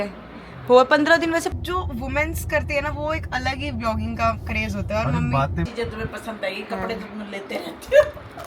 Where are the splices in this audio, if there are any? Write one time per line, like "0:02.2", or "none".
0:01.5
0:05.7